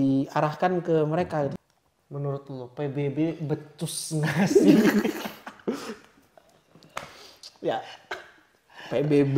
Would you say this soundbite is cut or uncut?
cut